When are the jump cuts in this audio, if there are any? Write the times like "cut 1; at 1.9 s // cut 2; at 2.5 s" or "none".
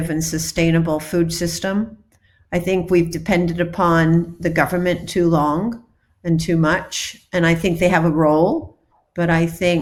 none

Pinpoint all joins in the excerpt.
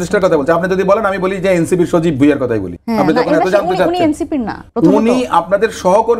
cut 1; at 2.7 s // cut 2; at 4.6 s

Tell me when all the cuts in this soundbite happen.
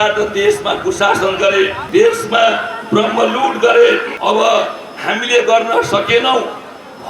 cut 1; at 1.8 s // cut 2; at 4.1 s

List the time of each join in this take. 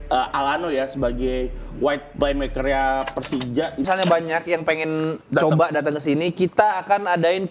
cut 1; at 3.8 s

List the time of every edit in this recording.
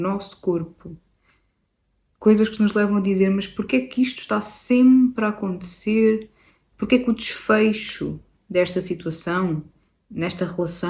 none

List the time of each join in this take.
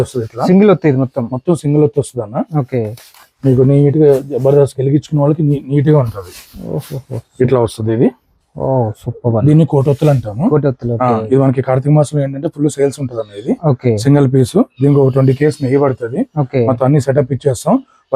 none

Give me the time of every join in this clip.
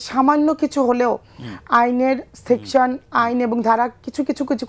none

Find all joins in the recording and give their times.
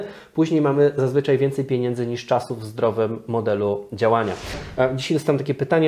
cut 1; at 4.6 s

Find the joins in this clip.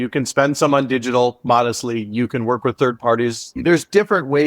cut 1; at 3.6 s

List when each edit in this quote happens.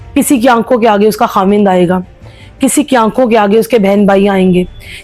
none

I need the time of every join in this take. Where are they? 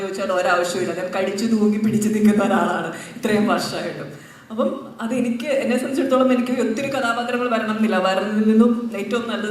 none

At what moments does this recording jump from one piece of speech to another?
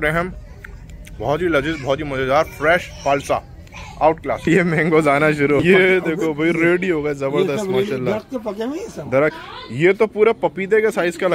cut 1; at 4.5 s // cut 2; at 9.4 s

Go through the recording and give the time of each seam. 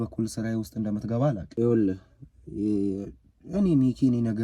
cut 1; at 1.4 s

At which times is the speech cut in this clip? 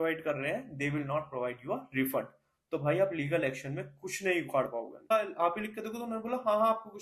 cut 1; at 5.1 s

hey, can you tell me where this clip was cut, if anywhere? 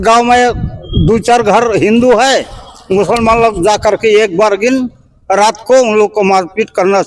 none

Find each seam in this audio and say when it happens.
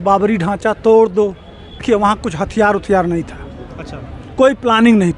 cut 1; at 1.8 s

